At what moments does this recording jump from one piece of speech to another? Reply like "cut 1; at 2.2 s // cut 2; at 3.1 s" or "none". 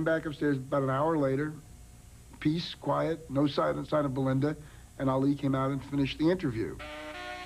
none

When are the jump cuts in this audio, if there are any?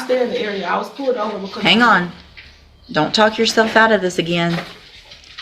none

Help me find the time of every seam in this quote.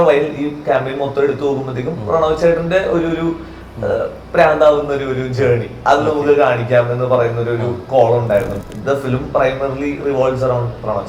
cut 1; at 8.6 s

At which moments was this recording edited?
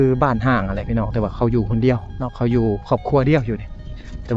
none

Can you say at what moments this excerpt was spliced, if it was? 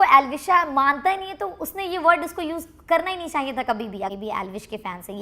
cut 1; at 4.1 s

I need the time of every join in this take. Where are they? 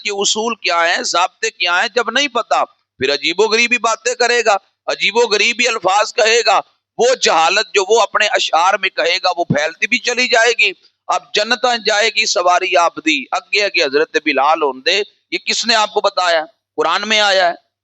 none

